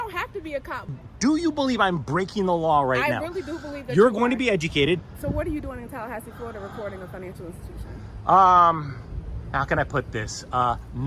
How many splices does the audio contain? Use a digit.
2